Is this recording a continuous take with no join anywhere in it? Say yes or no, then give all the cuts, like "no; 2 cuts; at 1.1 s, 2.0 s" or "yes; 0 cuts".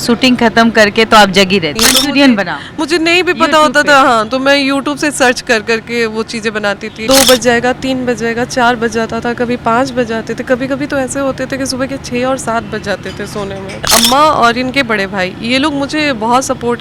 no; 3 cuts; at 1.8 s, 6.9 s, 13.9 s